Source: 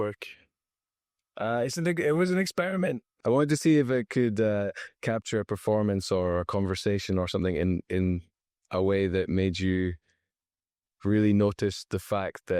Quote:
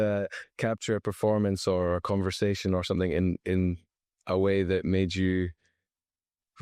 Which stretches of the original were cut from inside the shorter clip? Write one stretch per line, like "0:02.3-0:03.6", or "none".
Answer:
none